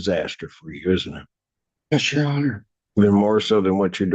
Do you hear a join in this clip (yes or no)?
no